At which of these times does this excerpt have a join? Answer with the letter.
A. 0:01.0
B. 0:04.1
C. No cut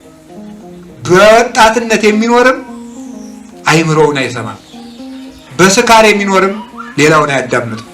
A